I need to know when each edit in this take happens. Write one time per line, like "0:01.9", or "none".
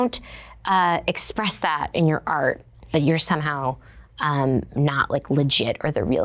0:02.9